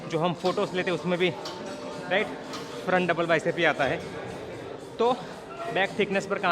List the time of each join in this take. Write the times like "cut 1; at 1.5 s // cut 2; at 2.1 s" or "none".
cut 1; at 5.6 s